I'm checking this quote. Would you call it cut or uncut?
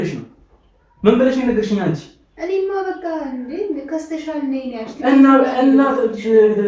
uncut